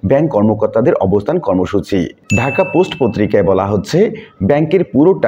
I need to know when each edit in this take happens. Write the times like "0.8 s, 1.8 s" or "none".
2.2 s